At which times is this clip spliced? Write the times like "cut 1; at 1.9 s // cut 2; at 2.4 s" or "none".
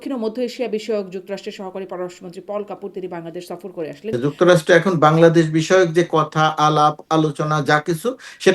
cut 1; at 4.1 s